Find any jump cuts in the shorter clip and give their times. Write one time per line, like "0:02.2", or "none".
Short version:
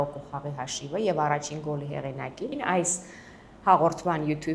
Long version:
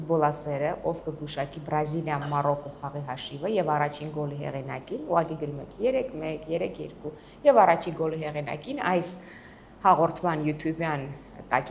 0:02.5